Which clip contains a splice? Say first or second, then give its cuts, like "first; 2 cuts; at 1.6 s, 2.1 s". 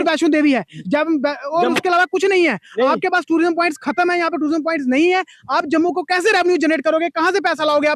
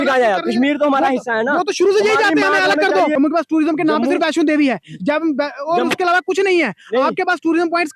second; 1 cut; at 3.1 s